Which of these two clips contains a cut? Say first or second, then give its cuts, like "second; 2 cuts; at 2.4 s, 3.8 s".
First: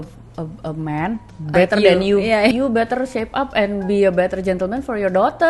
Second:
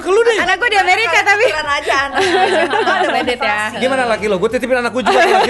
first; 1 cut; at 2.5 s